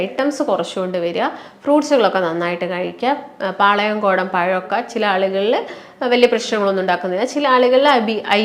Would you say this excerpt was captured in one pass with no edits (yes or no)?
yes